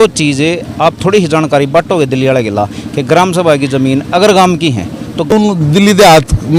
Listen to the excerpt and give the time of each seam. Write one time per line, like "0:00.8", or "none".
0:05.3